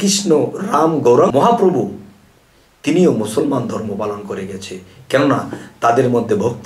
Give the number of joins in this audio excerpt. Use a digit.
1